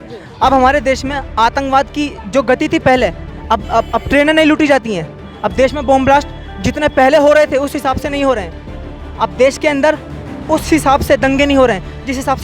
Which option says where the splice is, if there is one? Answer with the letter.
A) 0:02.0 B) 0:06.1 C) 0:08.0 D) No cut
D